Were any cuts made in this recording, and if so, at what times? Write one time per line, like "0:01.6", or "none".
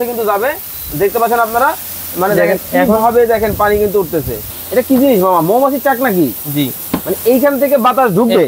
0:04.5

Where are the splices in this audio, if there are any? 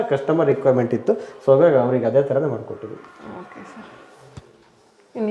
none

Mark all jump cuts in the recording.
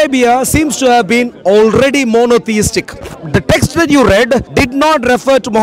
0:03.2
0:04.5

